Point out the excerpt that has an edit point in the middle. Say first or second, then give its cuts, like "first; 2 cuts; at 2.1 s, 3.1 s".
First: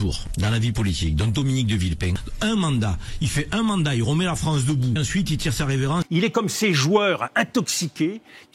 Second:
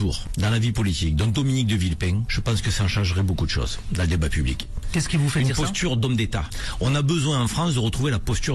first; 3 cuts; at 2.2 s, 5.0 s, 6.1 s